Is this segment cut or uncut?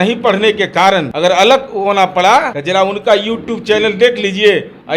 cut